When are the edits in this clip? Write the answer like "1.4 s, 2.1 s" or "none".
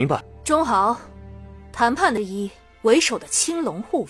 2.2 s